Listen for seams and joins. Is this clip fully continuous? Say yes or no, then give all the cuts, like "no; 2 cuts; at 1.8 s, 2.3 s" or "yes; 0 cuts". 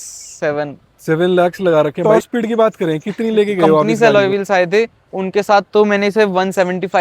no; 2 cuts; at 2.0 s, 3.9 s